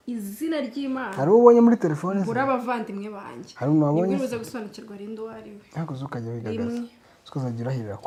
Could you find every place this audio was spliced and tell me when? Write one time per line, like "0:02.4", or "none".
none